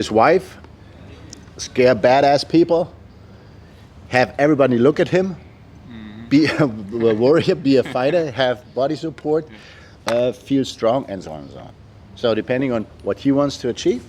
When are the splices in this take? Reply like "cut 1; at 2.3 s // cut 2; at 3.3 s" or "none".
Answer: none